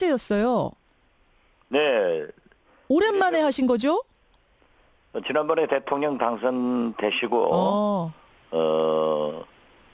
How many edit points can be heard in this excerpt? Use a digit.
1